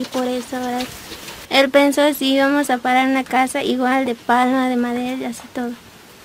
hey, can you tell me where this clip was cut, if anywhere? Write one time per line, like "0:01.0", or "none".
0:01.4